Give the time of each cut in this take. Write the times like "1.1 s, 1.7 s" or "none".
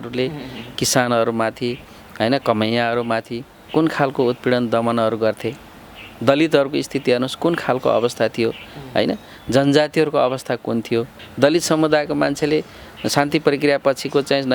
11.2 s

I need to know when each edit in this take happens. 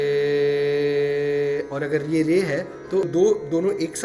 3.1 s

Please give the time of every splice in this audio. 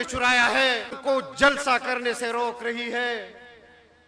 1.0 s

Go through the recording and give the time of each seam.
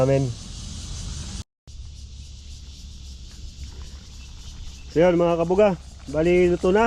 1.5 s

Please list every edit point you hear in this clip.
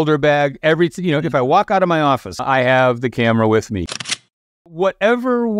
2.4 s, 4.2 s

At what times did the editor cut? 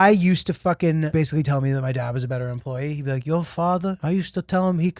1.1 s, 4.0 s

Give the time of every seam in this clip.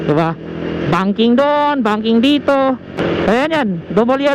3.0 s

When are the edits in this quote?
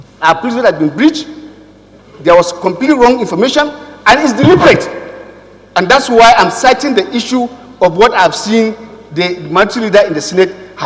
none

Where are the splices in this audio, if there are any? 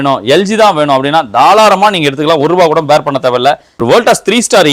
3.7 s

